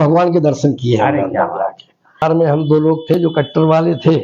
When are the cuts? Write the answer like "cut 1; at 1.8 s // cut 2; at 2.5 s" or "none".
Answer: cut 1; at 2.2 s